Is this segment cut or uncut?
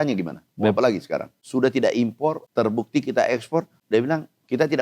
cut